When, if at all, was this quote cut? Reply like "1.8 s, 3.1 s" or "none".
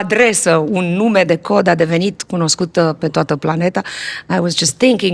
none